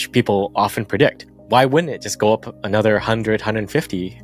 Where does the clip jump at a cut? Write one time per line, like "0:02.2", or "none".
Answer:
none